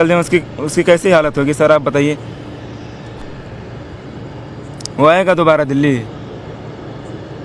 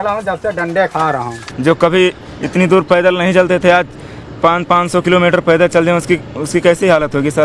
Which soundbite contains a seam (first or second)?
second